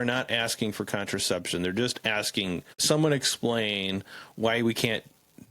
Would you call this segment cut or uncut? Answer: cut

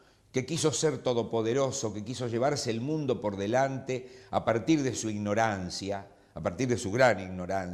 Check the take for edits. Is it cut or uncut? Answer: uncut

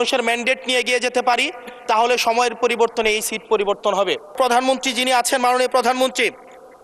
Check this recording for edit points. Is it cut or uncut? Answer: cut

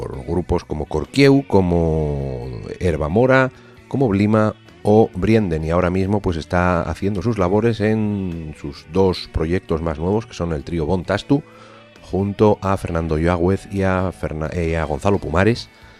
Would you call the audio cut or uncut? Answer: cut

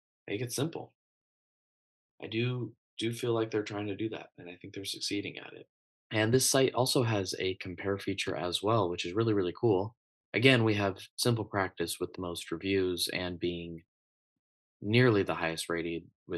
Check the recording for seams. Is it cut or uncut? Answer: cut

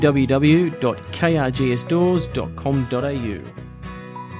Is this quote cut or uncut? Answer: cut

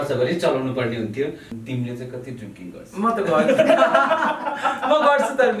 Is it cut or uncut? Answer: cut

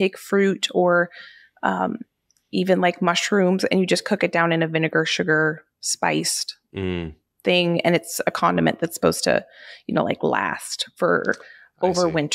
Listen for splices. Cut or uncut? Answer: uncut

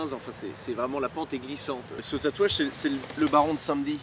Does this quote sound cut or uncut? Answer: cut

